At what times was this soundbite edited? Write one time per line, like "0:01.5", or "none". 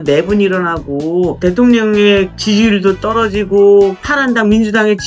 0:01.4
0:02.4
0:04.1

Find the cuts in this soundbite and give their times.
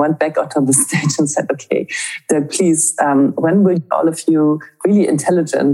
0:03.8

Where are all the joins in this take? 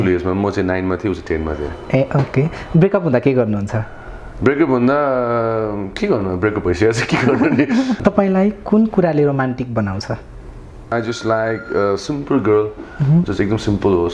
0:08.0
0:10.9

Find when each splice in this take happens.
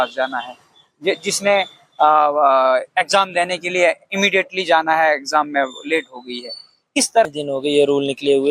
0:07.3

